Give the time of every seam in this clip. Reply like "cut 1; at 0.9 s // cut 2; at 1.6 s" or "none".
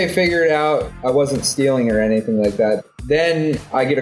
cut 1; at 2.8 s